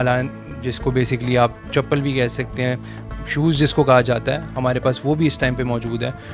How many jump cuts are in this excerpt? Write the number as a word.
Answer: one